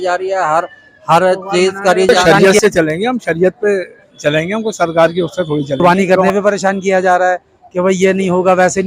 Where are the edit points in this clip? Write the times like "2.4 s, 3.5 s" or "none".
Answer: 2.2 s, 5.8 s